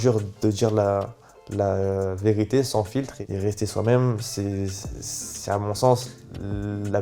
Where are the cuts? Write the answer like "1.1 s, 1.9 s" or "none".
3.2 s